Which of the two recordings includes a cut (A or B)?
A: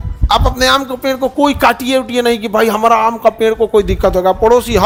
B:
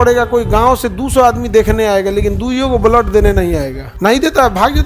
B